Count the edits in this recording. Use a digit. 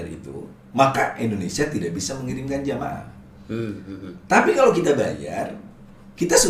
0